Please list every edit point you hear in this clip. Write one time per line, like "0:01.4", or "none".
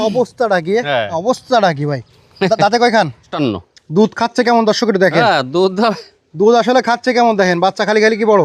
0:03.3